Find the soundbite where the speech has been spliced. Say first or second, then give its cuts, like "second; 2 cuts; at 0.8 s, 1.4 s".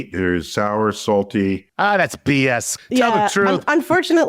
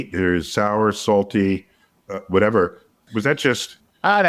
first; 2 cuts; at 1.7 s, 2.8 s